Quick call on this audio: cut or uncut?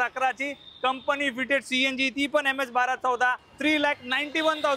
cut